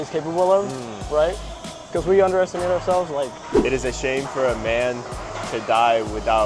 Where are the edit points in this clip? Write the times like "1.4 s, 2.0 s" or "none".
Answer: 3.5 s

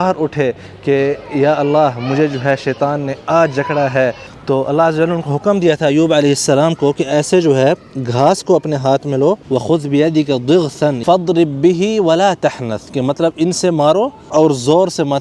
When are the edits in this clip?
4.3 s, 9.4 s, 11.0 s, 14.3 s

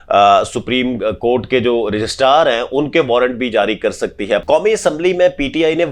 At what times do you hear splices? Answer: 4.4 s

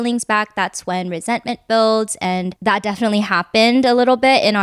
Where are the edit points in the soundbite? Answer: none

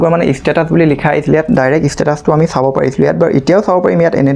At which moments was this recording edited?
none

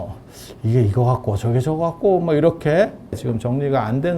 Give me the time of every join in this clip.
3.2 s

